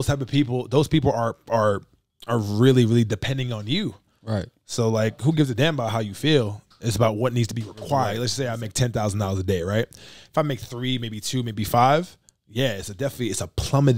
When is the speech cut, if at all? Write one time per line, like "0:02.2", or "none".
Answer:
0:08.2